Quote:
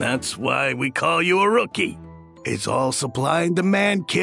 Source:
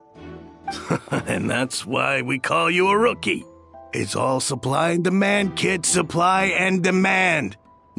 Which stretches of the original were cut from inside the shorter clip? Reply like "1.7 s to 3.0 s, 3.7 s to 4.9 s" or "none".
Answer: none